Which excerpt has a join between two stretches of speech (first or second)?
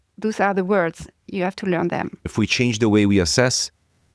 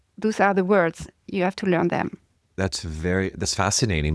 first